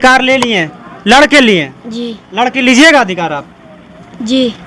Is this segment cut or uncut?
uncut